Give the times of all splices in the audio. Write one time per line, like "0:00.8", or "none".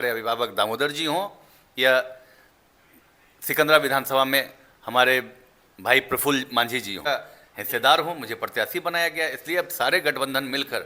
0:07.0